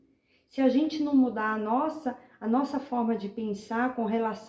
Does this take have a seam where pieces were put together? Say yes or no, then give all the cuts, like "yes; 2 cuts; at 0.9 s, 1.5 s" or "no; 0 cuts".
no; 0 cuts